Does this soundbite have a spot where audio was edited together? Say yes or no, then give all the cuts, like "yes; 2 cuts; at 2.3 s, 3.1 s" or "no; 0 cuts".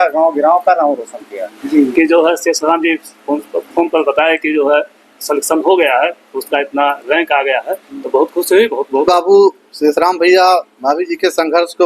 yes; 2 cuts; at 1.6 s, 9.0 s